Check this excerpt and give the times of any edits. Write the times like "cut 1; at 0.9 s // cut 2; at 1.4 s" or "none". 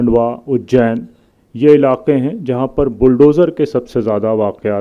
none